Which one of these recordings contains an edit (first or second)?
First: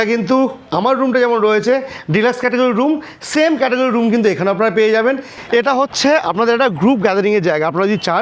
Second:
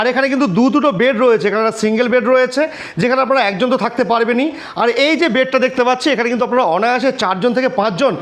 first